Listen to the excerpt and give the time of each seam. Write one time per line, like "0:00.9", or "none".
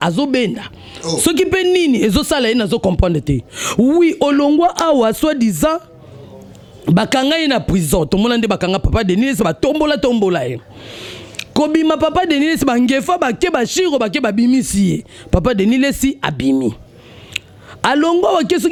none

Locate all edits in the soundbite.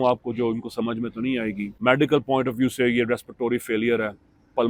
0:01.7

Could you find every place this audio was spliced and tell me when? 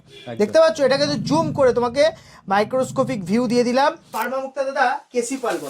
0:04.2

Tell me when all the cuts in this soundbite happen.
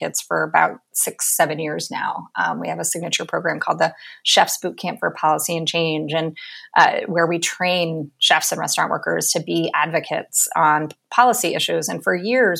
none

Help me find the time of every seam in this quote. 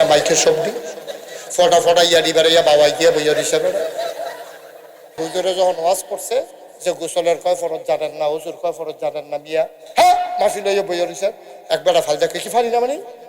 0:05.2

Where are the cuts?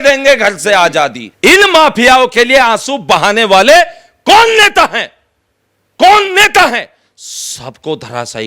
0:01.2

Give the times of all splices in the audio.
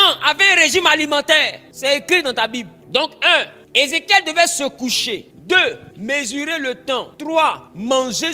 0:01.6
0:02.8
0:03.6
0:05.3
0:05.9
0:07.4

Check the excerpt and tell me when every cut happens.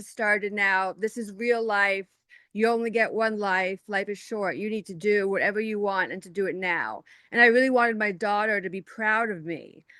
none

